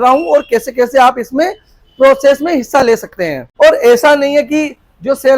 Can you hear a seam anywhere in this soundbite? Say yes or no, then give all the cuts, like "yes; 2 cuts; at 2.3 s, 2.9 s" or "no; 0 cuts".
yes; 1 cut; at 3.5 s